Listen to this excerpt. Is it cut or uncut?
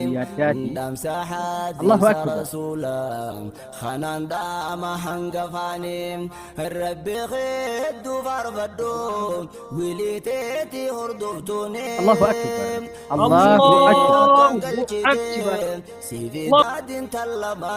cut